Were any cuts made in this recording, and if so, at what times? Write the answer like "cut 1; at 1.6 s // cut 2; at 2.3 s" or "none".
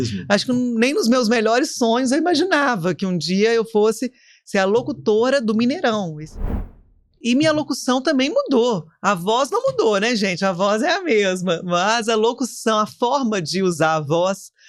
cut 1; at 6.5 s